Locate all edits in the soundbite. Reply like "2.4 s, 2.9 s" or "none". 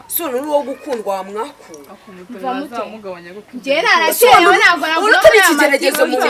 none